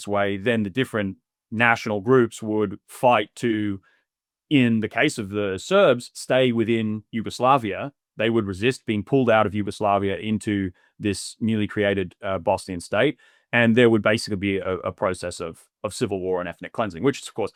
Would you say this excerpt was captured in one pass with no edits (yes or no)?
yes